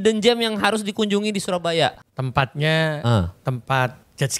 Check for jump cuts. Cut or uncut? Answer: cut